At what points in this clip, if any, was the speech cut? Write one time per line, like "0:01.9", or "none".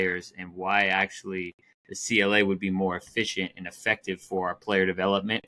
none